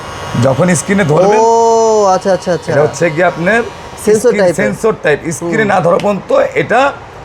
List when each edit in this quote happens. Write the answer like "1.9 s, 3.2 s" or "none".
none